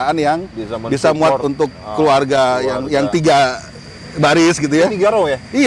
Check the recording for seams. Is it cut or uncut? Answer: uncut